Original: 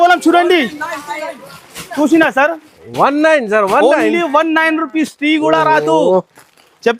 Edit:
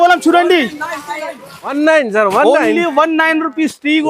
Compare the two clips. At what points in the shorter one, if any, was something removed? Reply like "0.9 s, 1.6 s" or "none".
1.7 s